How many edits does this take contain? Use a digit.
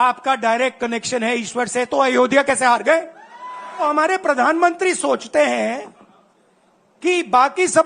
1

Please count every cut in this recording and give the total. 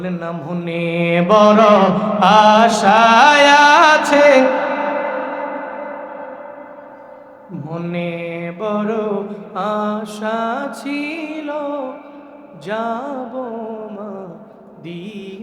0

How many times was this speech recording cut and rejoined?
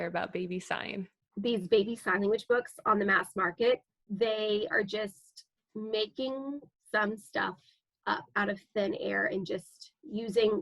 2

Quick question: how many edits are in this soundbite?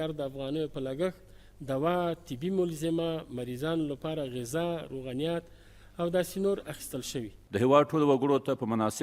1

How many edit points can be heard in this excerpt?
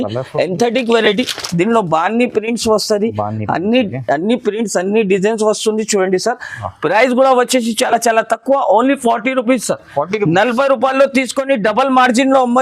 0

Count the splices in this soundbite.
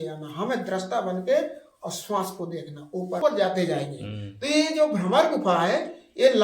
1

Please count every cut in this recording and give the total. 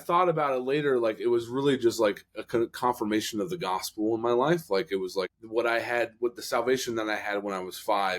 1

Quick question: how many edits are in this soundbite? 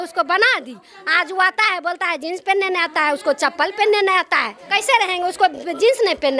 1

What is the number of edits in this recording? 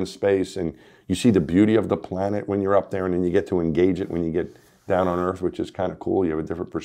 0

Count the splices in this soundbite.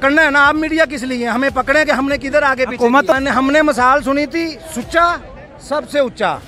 1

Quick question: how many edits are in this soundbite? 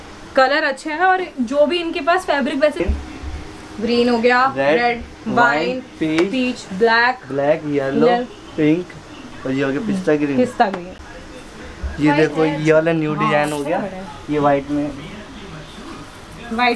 2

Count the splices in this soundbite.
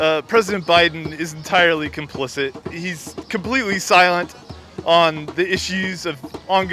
1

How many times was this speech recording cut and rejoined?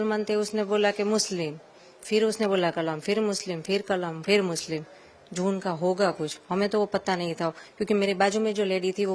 0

